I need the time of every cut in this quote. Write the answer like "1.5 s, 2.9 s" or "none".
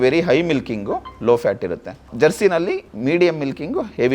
2.1 s, 2.9 s